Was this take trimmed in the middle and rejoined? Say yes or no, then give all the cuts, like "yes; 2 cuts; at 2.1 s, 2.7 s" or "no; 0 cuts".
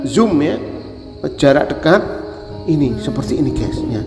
no; 0 cuts